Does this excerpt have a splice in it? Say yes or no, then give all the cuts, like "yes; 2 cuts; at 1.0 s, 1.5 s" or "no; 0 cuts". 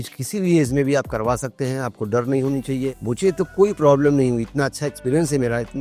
no; 0 cuts